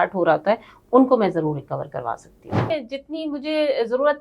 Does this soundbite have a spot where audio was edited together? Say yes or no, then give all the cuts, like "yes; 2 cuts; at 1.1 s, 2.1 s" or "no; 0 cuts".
yes; 1 cut; at 2.7 s